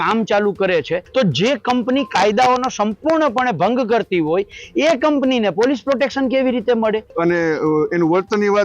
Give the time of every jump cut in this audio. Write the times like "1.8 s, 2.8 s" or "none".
1.1 s, 7.1 s